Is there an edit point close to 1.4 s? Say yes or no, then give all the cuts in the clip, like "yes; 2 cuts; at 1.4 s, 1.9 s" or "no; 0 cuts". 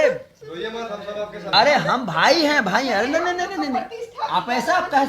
yes; 1 cut; at 1.4 s